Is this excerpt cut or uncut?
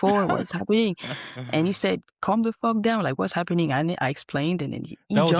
uncut